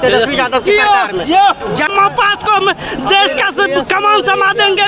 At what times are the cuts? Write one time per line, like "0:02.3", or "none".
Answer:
0:01.9